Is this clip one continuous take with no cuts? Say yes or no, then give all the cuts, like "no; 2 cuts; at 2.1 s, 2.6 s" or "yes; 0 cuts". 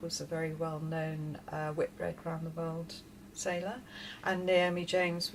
yes; 0 cuts